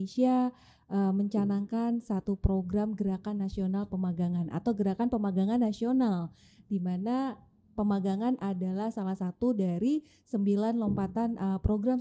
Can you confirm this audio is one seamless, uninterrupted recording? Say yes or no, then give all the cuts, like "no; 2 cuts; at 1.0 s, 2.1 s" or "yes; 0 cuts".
yes; 0 cuts